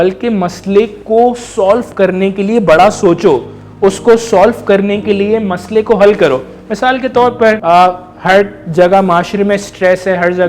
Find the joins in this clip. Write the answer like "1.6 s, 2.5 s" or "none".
7.6 s